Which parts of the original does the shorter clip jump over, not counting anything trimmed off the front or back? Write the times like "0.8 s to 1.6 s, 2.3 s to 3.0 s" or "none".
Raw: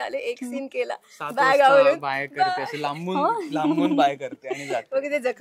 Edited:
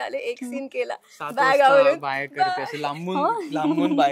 none